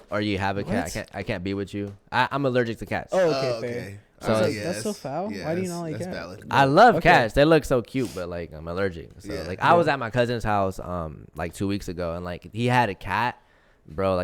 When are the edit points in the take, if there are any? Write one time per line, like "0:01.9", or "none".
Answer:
none

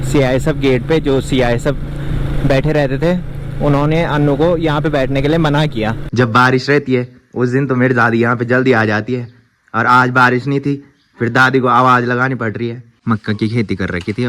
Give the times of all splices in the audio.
0:06.0
0:13.0

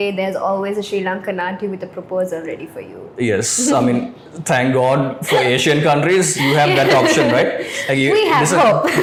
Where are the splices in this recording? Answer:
none

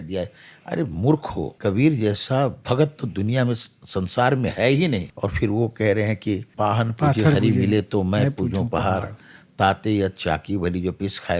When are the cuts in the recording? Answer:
0:01.5
0:05.1
0:06.5

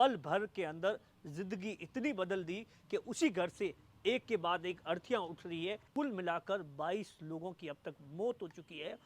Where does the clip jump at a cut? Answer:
0:05.8

